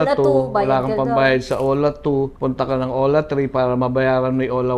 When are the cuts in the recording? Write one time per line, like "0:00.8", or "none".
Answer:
0:02.3